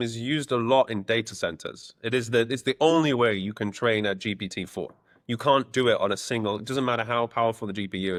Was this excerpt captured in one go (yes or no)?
yes